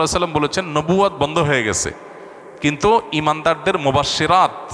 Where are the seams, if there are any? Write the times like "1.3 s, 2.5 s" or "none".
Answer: none